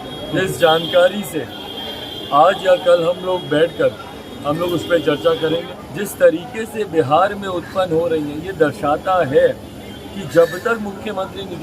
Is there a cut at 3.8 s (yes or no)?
no